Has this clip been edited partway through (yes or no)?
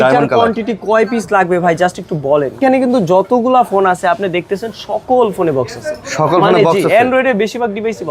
yes